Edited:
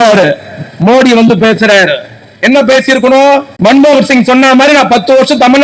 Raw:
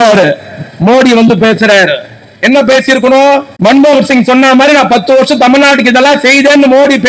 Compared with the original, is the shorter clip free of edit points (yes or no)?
yes